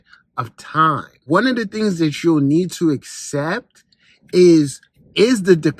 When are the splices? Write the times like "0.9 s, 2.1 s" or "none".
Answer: 1.2 s, 4.8 s